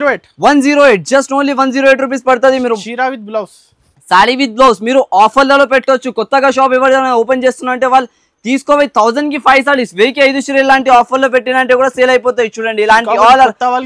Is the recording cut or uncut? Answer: uncut